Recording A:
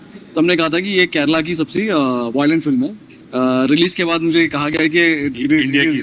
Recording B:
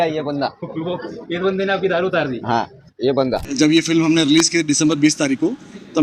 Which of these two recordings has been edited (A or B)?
B